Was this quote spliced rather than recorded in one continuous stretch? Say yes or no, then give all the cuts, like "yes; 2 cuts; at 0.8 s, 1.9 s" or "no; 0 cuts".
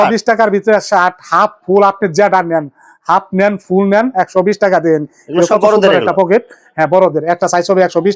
no; 0 cuts